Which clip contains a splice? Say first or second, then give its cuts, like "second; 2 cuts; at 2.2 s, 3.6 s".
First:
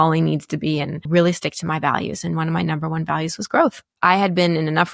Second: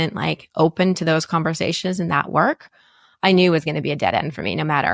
first; 2 cuts; at 1.0 s, 3.9 s